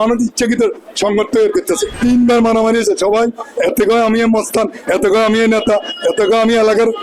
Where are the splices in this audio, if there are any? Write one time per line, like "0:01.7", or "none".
0:01.9